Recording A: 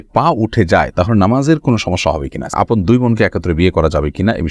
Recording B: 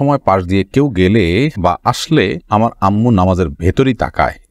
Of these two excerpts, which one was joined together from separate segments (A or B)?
A